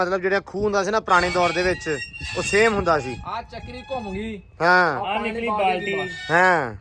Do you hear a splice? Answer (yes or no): no